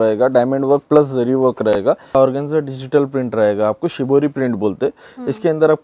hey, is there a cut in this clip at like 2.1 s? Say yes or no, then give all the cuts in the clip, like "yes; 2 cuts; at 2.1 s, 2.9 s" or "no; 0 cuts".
yes; 1 cut; at 2.1 s